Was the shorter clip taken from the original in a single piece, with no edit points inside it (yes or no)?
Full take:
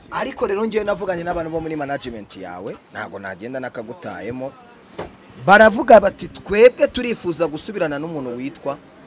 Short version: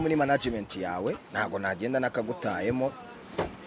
yes